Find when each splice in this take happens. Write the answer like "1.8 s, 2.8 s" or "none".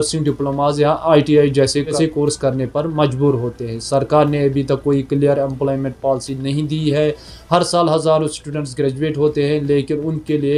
none